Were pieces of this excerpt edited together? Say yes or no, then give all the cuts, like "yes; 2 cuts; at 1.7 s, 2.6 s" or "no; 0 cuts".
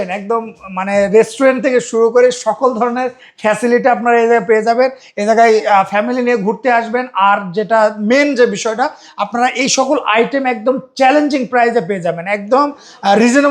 no; 0 cuts